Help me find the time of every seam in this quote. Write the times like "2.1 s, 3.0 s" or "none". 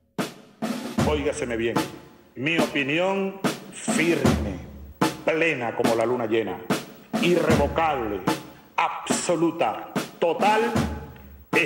0.9 s